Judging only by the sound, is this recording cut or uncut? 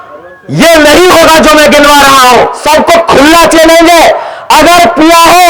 cut